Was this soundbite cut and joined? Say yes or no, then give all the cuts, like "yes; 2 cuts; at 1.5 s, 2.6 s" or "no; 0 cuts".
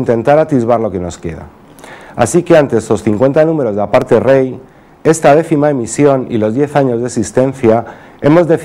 yes; 1 cut; at 5.5 s